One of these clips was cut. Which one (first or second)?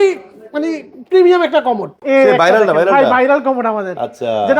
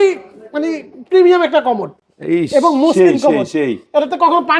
first